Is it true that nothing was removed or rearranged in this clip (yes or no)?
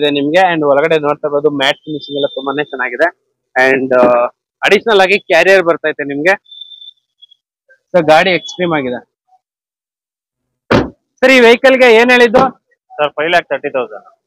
yes